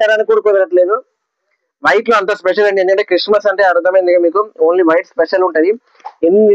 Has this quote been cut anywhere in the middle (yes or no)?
no